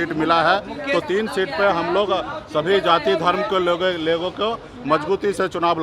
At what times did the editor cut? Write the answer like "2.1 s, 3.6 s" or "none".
none

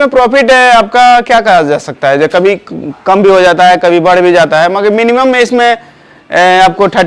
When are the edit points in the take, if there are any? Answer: none

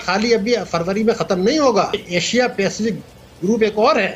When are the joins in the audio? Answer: 2.0 s

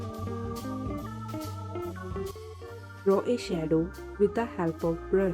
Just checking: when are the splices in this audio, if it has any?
2.6 s

